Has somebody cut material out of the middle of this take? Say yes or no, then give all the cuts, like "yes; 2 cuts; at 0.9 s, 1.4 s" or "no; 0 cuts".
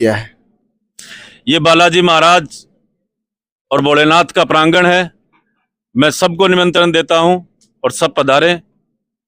no; 0 cuts